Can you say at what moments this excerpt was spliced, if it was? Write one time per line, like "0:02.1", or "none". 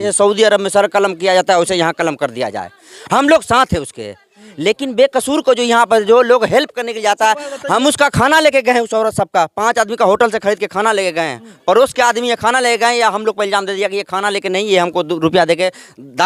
none